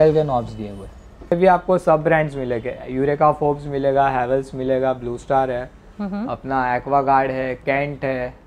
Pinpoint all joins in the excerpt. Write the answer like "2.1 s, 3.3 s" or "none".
1.3 s